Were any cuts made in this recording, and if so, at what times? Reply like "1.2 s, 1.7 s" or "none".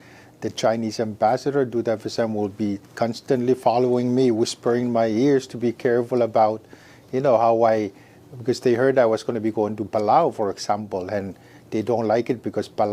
none